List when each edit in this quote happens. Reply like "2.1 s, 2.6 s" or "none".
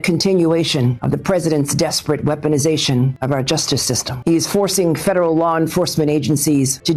none